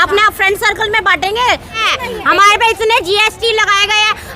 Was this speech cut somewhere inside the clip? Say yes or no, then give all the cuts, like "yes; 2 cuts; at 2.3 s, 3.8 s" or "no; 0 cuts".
yes; 1 cut; at 1.8 s